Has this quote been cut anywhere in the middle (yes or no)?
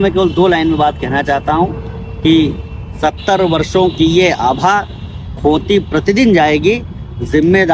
no